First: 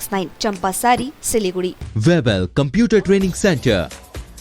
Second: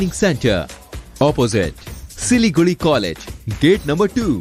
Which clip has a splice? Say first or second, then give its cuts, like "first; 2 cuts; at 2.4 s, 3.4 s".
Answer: first; 1 cut; at 1.9 s